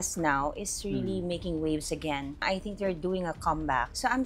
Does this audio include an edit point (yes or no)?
yes